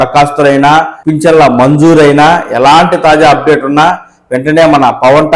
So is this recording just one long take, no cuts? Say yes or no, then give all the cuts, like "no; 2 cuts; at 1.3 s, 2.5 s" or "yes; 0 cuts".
no; 1 cut; at 1.0 s